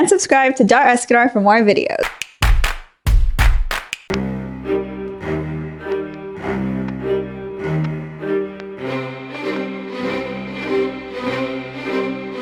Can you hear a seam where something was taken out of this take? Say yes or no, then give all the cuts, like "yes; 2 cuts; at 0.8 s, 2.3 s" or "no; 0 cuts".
no; 0 cuts